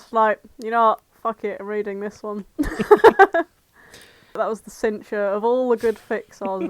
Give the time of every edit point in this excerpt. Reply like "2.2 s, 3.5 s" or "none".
4.4 s

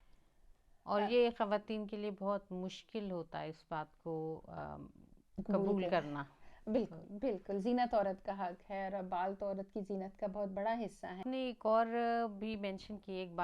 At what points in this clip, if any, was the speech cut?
11.2 s

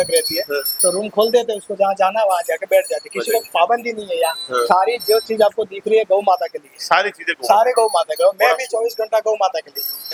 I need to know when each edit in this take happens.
none

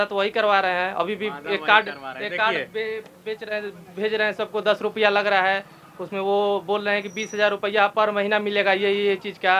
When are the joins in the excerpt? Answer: none

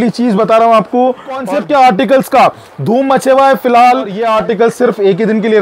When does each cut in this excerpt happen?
1.4 s, 4.2 s

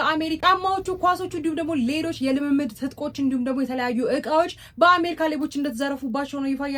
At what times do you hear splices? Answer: none

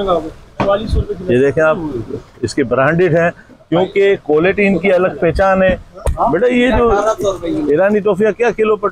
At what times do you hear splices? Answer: 5.9 s

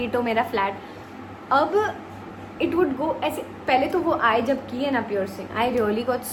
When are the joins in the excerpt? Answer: none

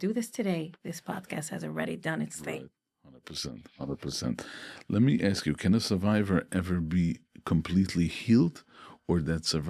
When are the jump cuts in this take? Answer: none

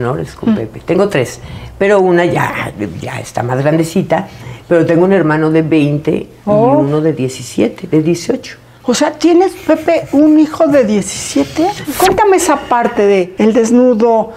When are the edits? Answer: 11.8 s, 13.3 s

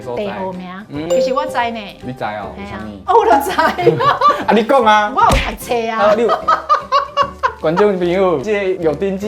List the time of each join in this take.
1.1 s

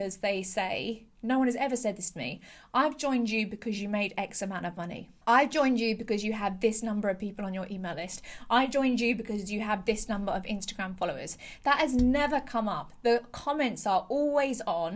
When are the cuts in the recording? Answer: 5.1 s

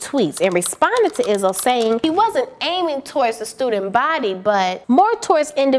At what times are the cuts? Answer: 2.0 s, 4.8 s

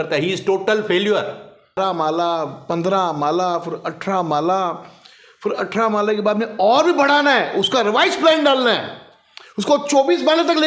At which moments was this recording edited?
1.8 s

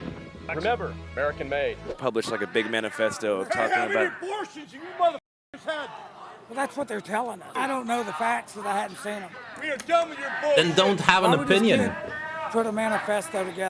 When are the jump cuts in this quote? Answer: 1.9 s, 7.5 s

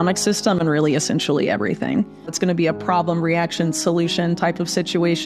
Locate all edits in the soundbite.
2.3 s

